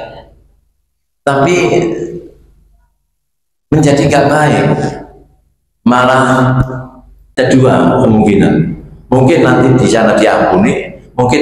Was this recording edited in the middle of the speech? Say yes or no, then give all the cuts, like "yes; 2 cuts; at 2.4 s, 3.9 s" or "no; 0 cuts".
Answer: yes; 1 cut; at 7.2 s